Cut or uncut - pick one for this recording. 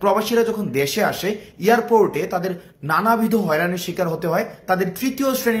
uncut